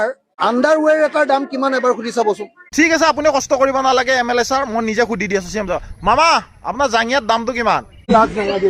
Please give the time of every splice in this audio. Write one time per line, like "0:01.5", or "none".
0:02.7